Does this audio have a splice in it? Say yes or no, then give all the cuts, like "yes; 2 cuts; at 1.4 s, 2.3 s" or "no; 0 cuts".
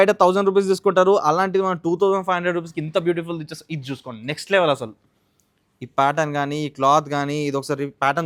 no; 0 cuts